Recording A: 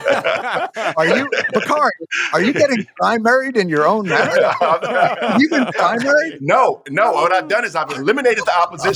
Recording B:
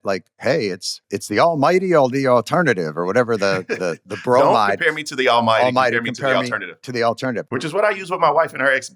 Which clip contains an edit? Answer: B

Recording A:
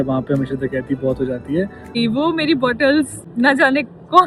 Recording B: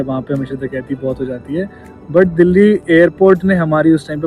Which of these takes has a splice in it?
A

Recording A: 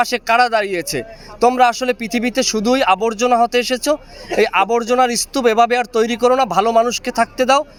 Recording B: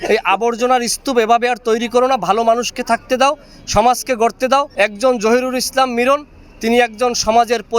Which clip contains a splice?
B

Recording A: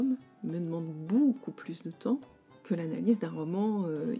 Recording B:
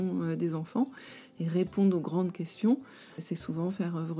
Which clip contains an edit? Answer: B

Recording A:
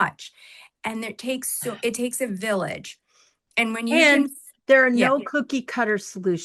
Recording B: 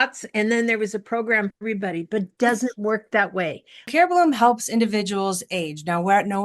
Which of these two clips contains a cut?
B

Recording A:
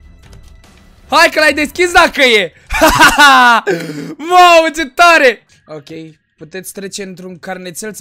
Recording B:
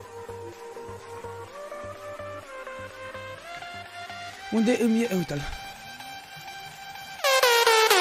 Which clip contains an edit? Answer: A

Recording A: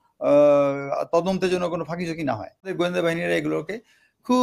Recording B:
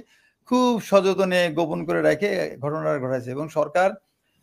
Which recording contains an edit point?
A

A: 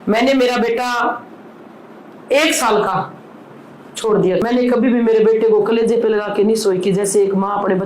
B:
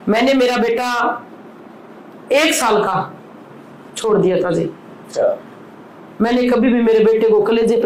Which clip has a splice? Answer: A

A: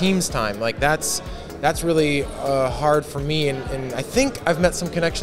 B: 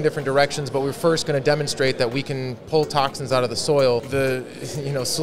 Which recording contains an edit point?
B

